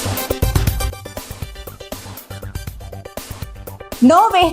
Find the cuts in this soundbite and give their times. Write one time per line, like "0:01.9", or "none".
0:02.5